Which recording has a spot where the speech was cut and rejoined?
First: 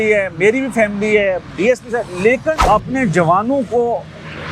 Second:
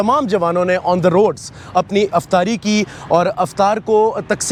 first; 1 cut; at 2.6 s

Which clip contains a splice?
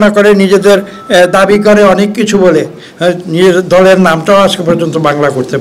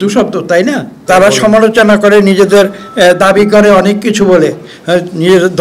second; 1 cut; at 0.9 s

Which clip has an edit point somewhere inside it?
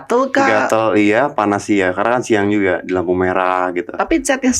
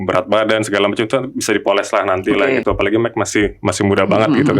second; 1 cut; at 2.6 s

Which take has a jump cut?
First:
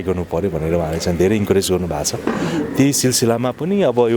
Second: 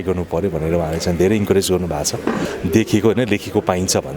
second; 1 cut; at 2.4 s

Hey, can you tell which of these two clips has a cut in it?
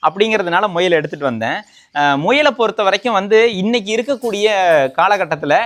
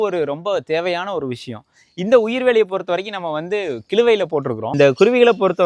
second; 1 cut; at 4.6 s

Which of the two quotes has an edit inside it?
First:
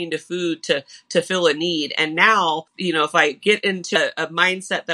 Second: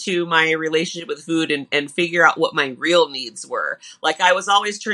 first; 2 cuts; at 2.7 s, 4.0 s

